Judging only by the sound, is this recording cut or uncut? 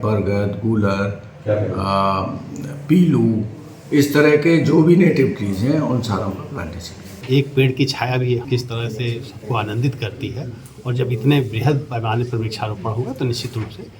cut